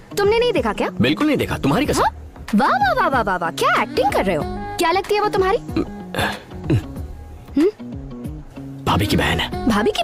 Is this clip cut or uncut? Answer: uncut